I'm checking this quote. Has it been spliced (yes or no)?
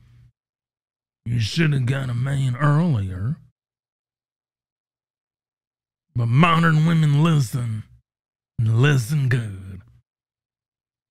no